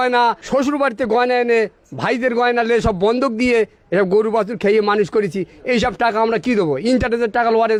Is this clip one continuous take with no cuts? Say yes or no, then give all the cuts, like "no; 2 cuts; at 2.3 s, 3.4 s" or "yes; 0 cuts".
yes; 0 cuts